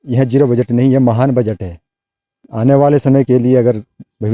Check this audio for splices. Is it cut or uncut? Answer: cut